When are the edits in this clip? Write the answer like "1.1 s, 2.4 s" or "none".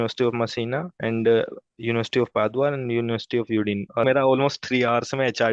0.9 s, 4.0 s